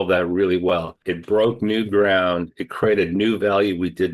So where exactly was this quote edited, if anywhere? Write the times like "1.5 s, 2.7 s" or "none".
1.1 s